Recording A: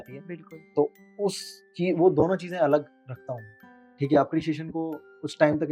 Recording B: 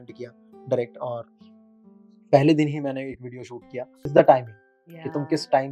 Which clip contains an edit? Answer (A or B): B